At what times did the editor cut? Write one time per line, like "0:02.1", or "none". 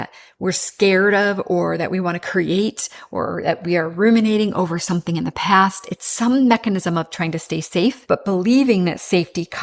0:08.0

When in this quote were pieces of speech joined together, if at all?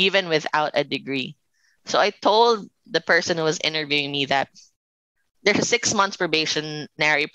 0:02.7
0:05.3

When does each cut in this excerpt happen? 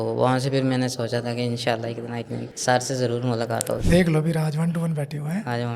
none

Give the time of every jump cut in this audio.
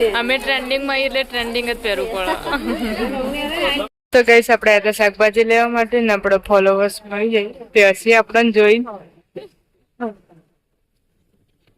0:03.8

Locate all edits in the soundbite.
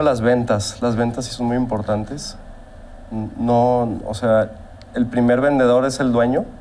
none

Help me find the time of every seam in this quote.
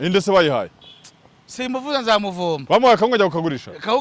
none

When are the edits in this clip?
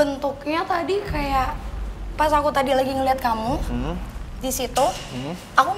none

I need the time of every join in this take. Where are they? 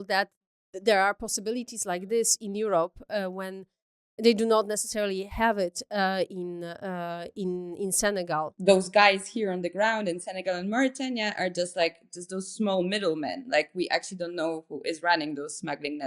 0:08.5

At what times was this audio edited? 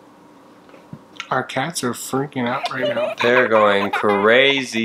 0:01.1

